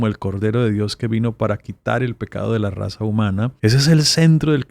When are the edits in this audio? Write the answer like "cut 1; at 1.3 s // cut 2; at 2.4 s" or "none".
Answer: cut 1; at 3.5 s